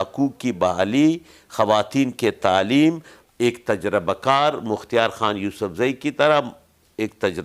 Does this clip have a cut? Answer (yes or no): yes